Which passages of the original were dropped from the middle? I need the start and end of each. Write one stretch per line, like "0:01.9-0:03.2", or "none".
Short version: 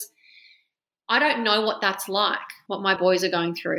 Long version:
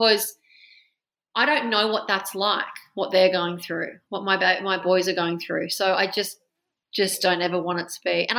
0:03.0-0:04.6

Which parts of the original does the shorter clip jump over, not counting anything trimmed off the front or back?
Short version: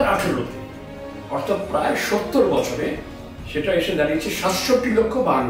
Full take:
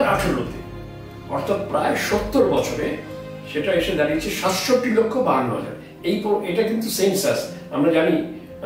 none

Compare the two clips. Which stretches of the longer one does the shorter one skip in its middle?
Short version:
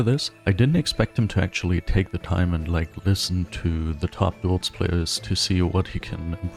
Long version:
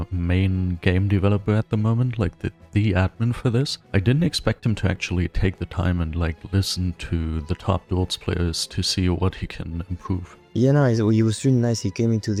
none

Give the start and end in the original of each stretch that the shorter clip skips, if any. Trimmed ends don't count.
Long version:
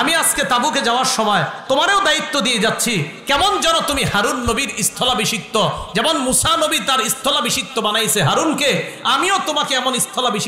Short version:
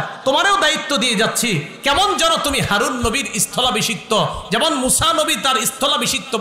none

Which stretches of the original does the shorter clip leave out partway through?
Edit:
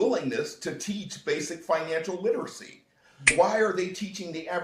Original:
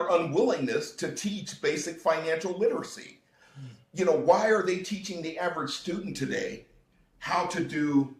0:03.7-0:04.2

